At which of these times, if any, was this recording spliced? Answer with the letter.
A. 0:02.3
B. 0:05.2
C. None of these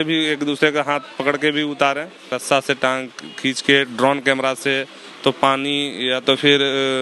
A